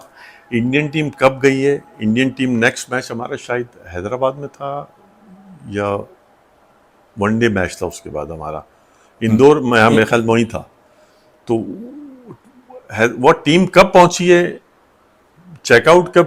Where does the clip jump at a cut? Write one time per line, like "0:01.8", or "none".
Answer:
none